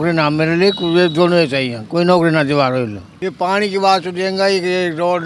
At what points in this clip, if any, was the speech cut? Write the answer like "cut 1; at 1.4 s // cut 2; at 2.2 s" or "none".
cut 1; at 3.0 s